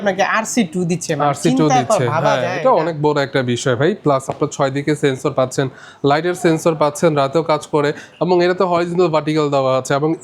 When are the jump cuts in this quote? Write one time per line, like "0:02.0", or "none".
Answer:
none